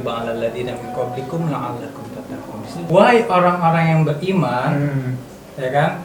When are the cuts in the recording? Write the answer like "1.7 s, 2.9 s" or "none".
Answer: 2.8 s